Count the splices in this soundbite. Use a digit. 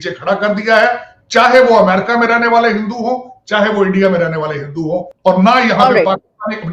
1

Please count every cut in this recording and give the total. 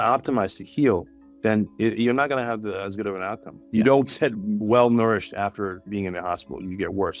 2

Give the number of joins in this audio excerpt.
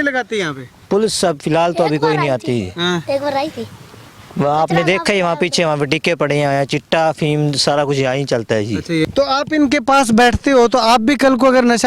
1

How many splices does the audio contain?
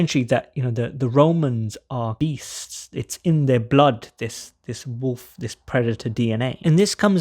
1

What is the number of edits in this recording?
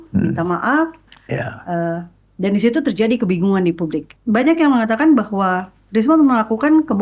1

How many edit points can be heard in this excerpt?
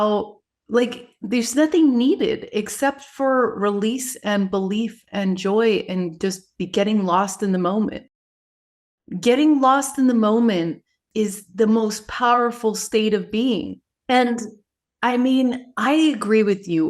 1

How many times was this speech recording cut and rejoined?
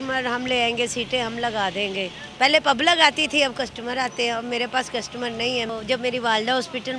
2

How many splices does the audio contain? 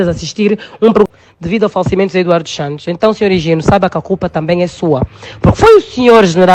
1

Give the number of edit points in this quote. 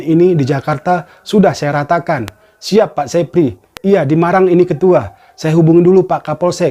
0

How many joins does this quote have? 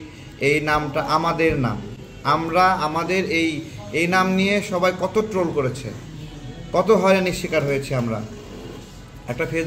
0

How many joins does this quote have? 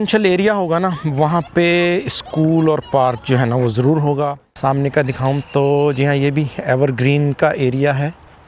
1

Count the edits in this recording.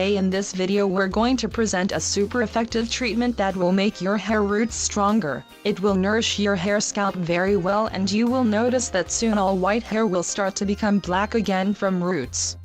1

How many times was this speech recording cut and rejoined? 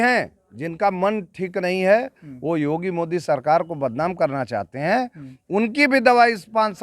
0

